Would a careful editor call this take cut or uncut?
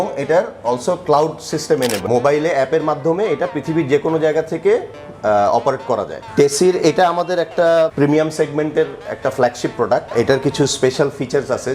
cut